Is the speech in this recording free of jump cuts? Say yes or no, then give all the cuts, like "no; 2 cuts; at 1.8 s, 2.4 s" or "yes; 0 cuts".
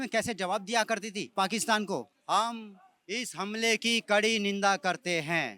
no; 2 cuts; at 1.2 s, 2.1 s